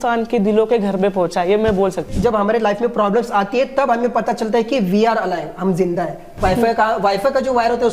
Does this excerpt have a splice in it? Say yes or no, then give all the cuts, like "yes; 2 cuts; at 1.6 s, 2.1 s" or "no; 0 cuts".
yes; 2 cuts; at 2.0 s, 6.3 s